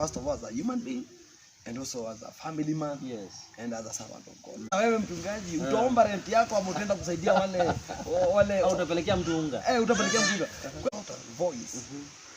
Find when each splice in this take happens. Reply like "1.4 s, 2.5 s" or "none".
4.7 s, 10.9 s